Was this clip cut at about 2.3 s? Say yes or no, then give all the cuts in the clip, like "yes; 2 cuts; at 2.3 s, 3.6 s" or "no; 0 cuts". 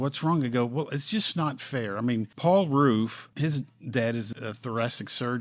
yes; 3 cuts; at 2.3 s, 3.2 s, 4.3 s